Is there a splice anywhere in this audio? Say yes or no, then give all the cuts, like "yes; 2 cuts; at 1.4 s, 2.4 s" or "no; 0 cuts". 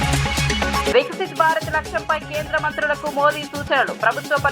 yes; 1 cut; at 0.9 s